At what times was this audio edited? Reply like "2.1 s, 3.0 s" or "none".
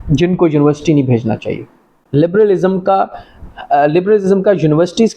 1.9 s